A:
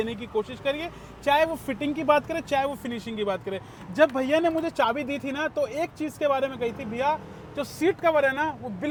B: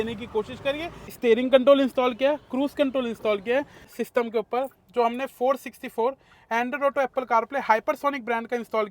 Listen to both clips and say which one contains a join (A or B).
B